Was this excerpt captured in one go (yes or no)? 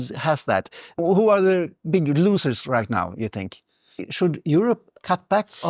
no